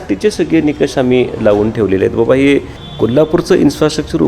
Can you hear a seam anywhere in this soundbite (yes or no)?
yes